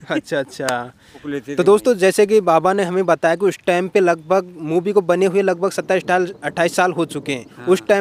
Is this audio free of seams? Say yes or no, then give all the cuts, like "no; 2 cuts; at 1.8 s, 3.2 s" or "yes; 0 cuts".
no; 1 cut; at 1.3 s